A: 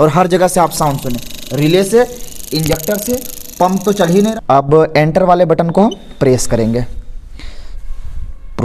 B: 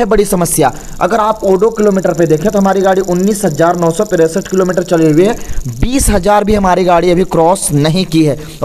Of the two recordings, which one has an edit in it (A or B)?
A